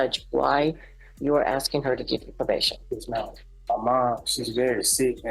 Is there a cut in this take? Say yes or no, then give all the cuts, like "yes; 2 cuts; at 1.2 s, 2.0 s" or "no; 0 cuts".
yes; 1 cut; at 3.5 s